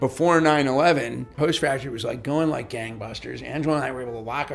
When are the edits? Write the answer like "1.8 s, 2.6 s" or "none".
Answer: 1.3 s